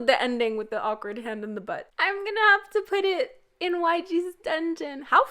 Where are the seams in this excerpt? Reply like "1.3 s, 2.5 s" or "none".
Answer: 1.9 s